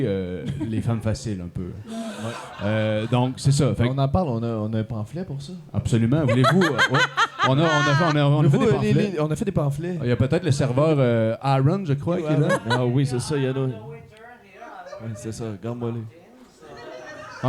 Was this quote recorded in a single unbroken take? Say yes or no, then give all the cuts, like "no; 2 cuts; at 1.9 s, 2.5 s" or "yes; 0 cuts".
yes; 0 cuts